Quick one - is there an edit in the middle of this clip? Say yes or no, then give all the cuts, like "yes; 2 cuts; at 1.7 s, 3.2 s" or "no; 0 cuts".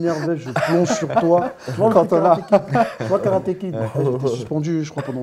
no; 0 cuts